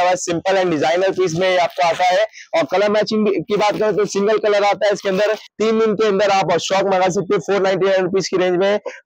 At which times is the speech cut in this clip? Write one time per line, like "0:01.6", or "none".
none